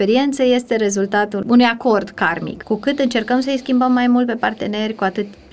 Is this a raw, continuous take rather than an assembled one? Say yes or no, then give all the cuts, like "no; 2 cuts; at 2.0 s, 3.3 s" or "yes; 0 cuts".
no; 2 cuts; at 1.4 s, 2.5 s